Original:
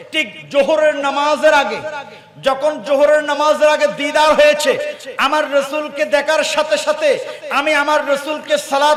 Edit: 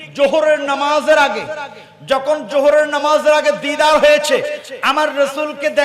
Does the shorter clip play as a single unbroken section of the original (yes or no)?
yes